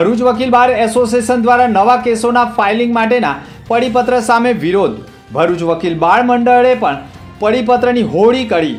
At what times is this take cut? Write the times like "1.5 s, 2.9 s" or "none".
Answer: none

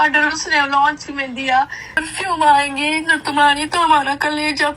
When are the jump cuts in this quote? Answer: 2.0 s

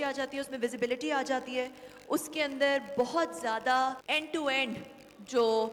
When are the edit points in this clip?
4.0 s

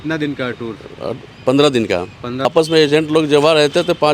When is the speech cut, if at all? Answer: 2.4 s

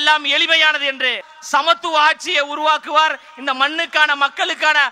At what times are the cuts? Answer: 1.3 s

